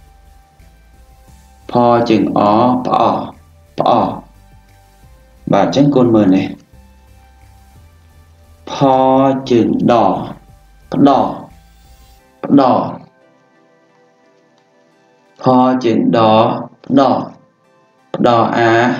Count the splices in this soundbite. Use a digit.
2